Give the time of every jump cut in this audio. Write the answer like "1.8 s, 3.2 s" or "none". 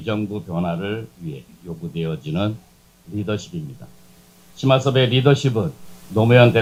none